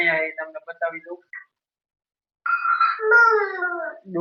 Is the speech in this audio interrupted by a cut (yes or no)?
no